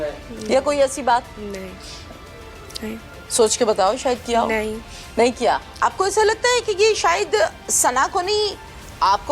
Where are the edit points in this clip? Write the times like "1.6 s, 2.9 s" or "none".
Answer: 1.3 s, 5.7 s